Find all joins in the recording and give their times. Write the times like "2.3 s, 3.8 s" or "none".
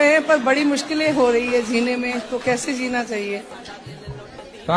none